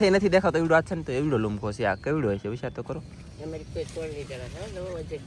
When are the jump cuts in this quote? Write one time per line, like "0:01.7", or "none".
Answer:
none